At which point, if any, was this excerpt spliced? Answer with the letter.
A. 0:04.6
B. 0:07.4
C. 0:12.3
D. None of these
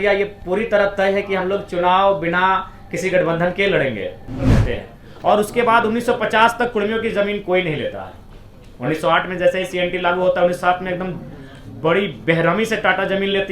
A